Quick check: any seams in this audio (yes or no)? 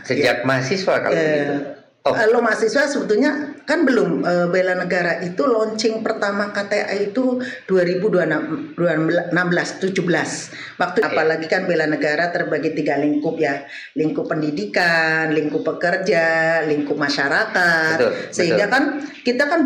yes